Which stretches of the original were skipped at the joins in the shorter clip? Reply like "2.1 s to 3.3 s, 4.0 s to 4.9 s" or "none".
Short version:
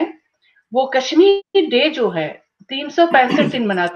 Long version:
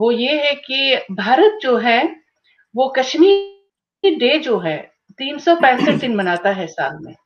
3.5 s to 3.9 s